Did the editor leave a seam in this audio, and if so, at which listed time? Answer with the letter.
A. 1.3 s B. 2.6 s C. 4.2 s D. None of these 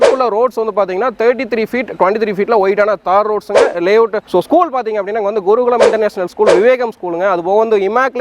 C